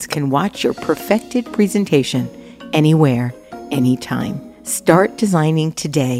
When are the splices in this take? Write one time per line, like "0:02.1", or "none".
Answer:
none